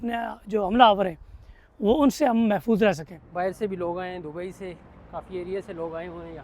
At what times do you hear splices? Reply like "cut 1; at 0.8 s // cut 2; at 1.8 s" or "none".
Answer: cut 1; at 3.2 s